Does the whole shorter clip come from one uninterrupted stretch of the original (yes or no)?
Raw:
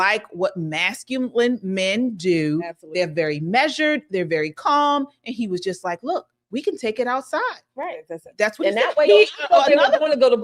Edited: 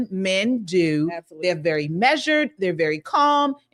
yes